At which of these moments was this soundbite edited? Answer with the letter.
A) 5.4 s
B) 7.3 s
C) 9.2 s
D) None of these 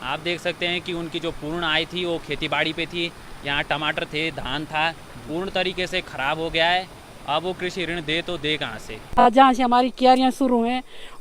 C